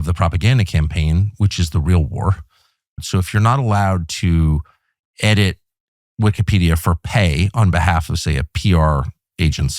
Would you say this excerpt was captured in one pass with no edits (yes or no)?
no